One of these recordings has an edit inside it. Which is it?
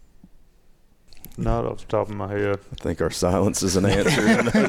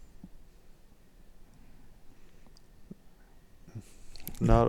first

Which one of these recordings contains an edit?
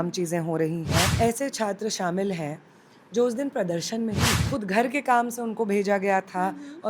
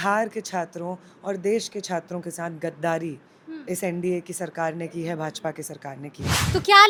first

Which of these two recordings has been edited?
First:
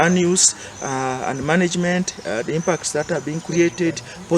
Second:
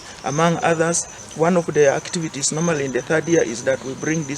second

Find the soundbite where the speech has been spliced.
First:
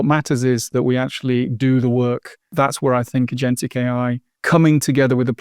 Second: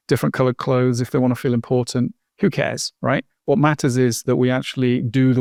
first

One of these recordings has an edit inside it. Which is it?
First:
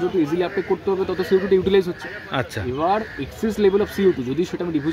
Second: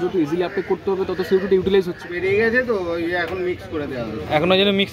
second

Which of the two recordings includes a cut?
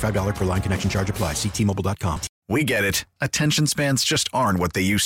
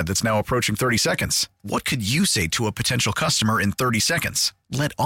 first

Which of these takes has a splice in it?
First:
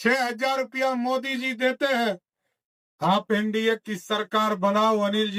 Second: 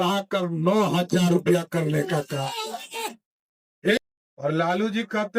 second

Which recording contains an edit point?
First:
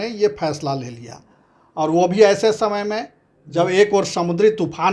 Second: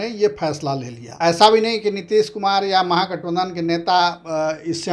second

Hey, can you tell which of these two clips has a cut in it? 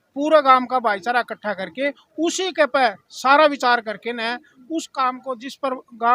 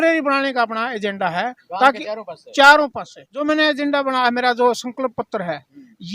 second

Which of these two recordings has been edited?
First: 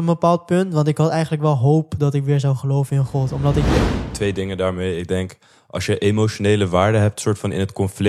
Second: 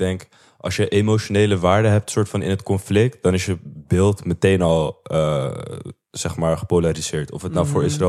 first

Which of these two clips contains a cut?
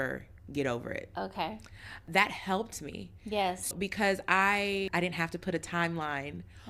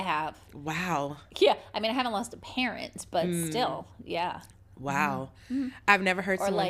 first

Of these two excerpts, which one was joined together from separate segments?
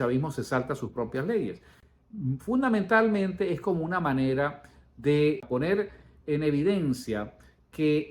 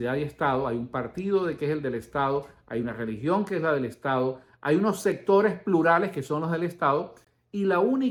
first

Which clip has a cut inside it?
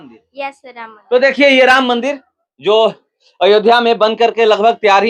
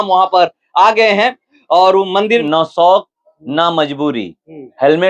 second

